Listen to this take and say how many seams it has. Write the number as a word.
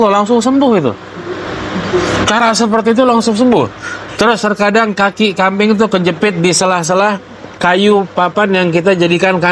zero